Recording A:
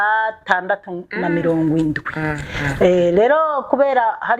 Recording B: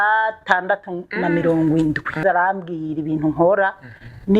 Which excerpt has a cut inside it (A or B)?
B